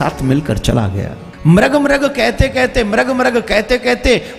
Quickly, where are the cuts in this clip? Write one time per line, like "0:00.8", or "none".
0:01.2